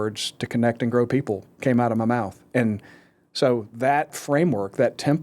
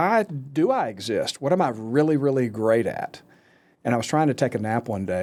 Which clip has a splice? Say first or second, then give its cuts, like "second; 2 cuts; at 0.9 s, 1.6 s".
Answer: first; 1 cut; at 4.2 s